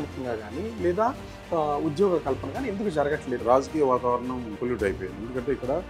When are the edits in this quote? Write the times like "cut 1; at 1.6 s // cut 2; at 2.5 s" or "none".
cut 1; at 3.4 s // cut 2; at 4.5 s